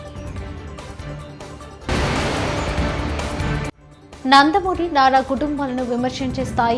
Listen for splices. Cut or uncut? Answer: uncut